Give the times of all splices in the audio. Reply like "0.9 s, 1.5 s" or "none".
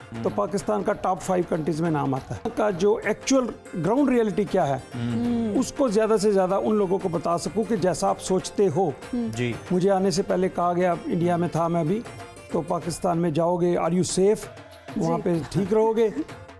2.5 s